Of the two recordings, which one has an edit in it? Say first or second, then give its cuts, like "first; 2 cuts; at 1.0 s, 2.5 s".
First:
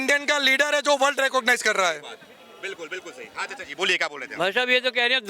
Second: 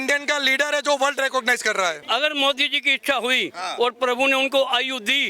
second; 1 cut; at 2.0 s